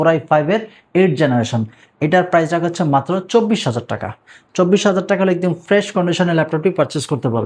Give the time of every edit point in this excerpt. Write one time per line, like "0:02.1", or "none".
none